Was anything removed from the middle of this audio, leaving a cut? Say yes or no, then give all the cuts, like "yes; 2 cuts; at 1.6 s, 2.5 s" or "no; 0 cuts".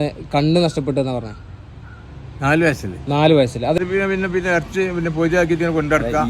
yes; 1 cut; at 3.8 s